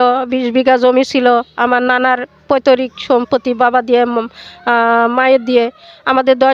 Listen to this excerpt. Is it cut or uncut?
uncut